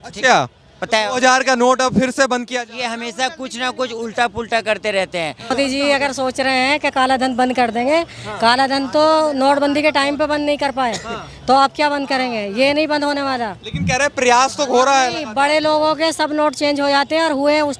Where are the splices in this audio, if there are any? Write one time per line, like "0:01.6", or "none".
0:05.5